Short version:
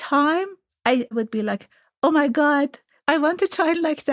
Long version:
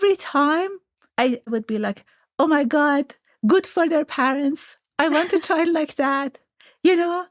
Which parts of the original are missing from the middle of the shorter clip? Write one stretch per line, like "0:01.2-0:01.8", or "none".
0:01.2-0:01.3
0:03.2-0:04.8